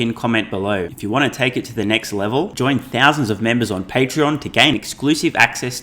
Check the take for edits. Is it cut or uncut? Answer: cut